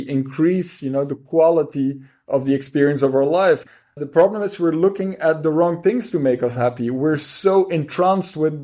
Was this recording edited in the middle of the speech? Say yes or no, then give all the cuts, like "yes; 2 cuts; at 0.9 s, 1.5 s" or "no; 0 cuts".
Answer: yes; 1 cut; at 3.8 s